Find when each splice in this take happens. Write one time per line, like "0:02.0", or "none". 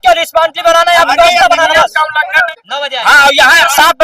0:02.4

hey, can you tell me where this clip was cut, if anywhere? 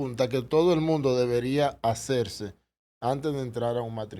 none

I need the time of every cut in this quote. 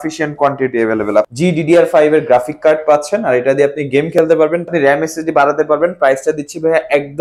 0:01.3
0:04.6

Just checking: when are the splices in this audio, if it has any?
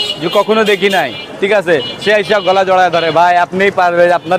none

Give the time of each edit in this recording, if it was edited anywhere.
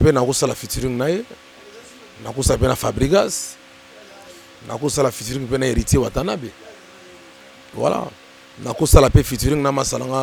none

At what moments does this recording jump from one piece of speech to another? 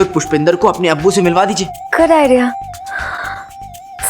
0:01.7

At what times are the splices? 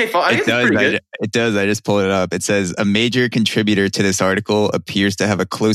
none

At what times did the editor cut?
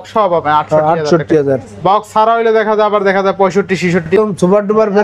0:04.0

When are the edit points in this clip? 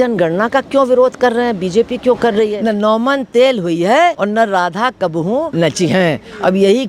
0:02.6
0:04.2
0:05.5

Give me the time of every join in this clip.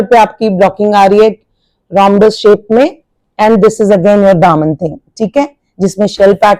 none

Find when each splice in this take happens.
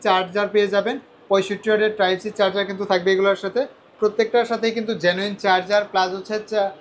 none

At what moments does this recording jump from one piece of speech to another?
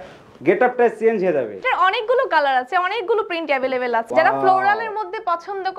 0:01.5
0:04.1

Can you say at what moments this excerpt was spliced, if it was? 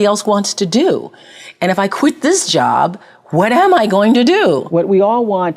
0:04.7

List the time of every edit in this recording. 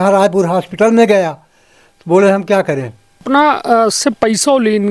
0:03.2

